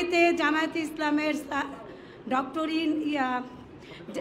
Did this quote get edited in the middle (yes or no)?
no